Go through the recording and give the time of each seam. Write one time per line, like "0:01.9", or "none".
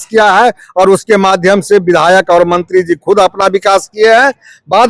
none

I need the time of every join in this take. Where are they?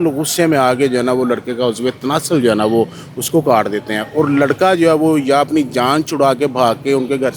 none

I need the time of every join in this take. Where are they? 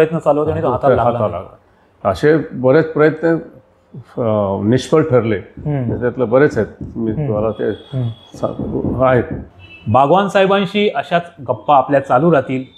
none

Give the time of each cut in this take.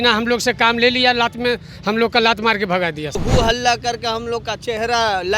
0:03.2

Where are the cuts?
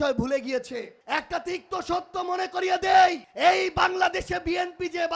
0:00.9
0:03.3

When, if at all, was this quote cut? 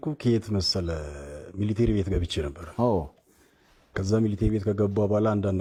none

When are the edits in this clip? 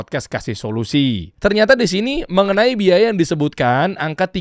0:01.3

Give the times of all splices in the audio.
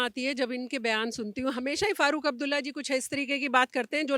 none

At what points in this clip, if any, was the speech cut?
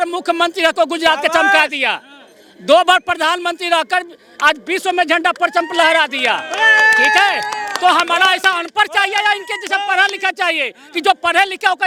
none

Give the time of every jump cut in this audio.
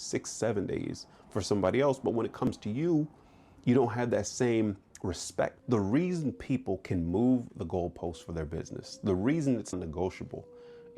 0:05.6
0:09.7

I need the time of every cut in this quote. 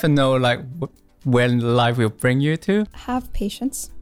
0:02.9

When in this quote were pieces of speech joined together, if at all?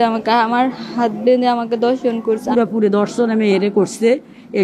0:02.5

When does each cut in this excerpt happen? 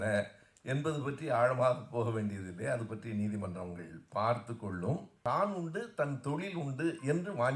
0:05.1

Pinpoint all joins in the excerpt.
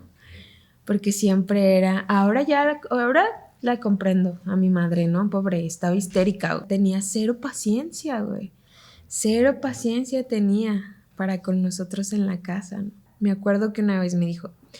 0:13.0

